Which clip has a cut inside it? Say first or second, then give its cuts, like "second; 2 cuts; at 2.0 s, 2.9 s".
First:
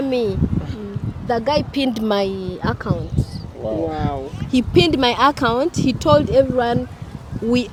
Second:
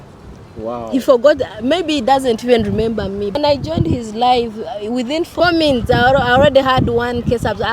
second; 2 cuts; at 3.4 s, 5.3 s